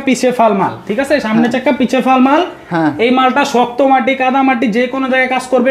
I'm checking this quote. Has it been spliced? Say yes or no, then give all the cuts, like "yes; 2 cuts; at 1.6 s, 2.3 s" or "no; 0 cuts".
no; 0 cuts